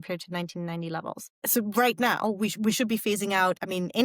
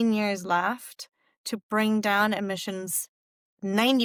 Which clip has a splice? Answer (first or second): first